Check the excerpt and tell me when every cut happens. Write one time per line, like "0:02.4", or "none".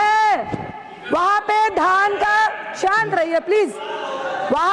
none